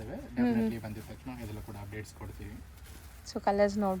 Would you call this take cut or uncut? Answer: uncut